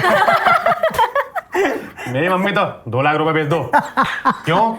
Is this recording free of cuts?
yes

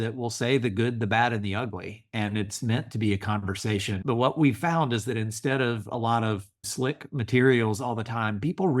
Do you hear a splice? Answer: yes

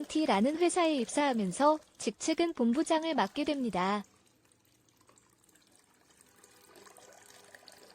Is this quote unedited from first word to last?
yes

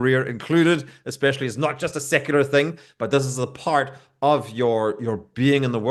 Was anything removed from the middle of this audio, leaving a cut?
no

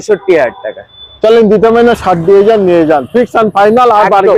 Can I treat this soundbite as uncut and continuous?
yes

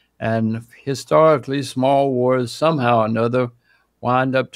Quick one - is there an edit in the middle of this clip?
no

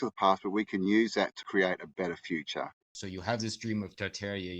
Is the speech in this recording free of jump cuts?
no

